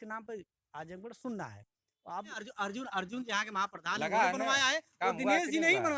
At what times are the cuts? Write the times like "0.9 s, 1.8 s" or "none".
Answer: 2.4 s